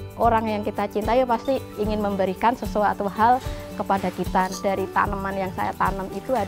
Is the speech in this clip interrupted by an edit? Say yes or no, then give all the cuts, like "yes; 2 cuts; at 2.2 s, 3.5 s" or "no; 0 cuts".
yes; 1 cut; at 4.5 s